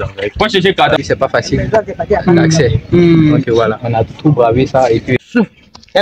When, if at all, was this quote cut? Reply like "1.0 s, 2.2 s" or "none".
1.0 s, 5.1 s